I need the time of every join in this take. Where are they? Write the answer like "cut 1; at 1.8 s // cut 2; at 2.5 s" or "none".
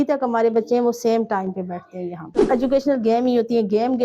cut 1; at 2.4 s